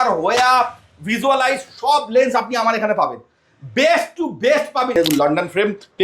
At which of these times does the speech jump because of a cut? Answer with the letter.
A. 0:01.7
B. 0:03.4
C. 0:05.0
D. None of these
C